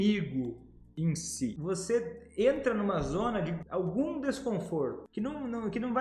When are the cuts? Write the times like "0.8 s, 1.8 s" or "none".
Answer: 1.6 s, 3.6 s, 5.0 s